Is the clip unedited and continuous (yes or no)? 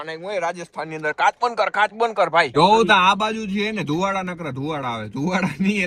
yes